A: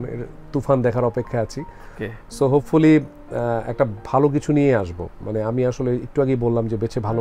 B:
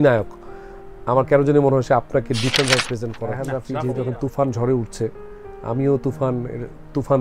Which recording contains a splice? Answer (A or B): B